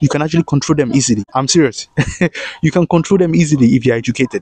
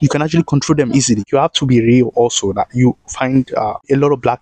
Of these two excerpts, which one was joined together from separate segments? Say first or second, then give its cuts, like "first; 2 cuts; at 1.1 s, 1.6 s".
second; 1 cut; at 1.3 s